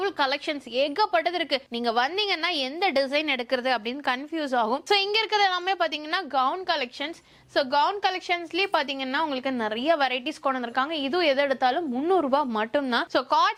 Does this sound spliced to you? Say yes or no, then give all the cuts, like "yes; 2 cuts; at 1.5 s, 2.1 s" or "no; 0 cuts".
no; 0 cuts